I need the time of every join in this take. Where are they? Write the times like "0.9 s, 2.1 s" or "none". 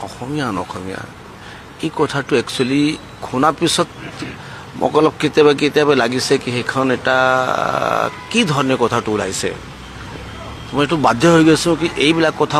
none